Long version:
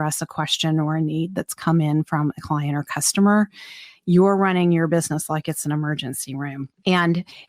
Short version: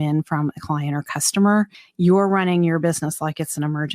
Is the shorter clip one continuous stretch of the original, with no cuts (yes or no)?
no